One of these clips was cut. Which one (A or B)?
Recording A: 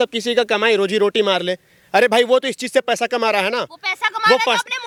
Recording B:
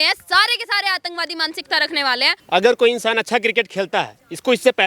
B